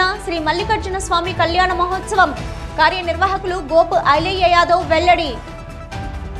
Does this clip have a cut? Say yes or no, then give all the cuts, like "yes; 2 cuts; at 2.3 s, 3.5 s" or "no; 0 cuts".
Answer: no; 0 cuts